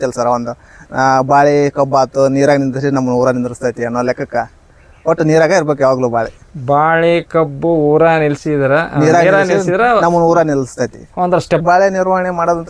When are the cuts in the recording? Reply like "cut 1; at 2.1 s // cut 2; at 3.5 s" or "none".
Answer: cut 1; at 11.6 s